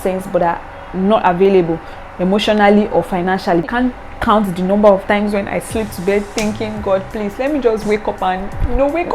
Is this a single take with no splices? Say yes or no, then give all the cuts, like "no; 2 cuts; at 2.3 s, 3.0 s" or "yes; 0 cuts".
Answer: no; 1 cut; at 3.7 s